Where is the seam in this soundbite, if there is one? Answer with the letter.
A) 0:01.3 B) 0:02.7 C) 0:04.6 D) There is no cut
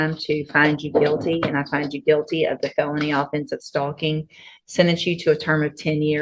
D